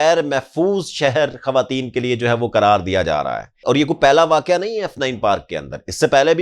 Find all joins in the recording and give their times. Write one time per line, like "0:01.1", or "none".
0:03.6